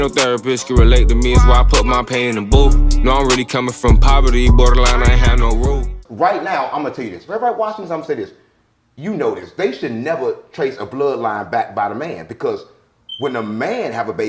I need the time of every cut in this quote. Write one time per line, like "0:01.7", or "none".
0:06.0